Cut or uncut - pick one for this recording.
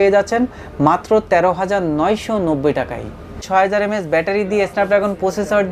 cut